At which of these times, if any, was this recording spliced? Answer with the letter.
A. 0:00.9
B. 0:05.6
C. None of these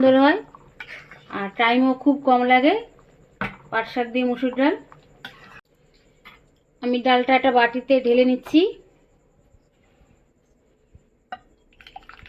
B